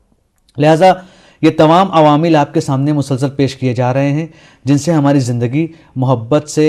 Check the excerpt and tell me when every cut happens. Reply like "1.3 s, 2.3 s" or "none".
3.9 s

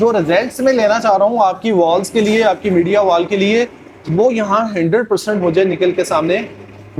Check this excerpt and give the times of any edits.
none

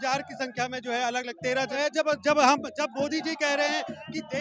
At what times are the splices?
1.7 s

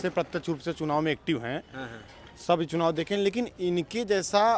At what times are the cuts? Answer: none

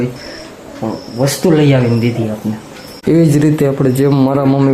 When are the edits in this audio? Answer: 2.9 s

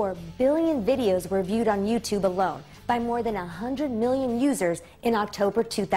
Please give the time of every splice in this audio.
none

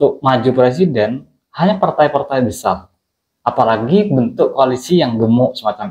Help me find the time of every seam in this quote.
none

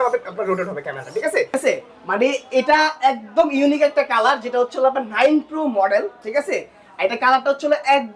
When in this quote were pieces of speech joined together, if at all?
1.5 s

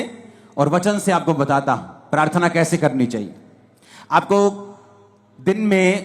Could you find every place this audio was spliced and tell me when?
none

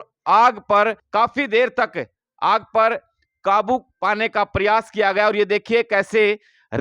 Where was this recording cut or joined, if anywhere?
1.0 s

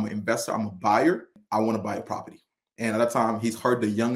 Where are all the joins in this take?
1.4 s

